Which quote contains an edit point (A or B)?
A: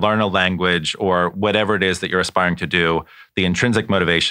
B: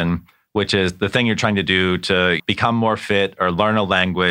B